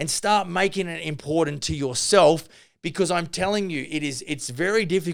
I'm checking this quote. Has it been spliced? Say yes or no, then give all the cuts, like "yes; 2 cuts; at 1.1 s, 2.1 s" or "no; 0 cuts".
no; 0 cuts